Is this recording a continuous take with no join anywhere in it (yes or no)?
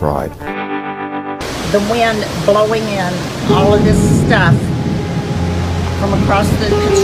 yes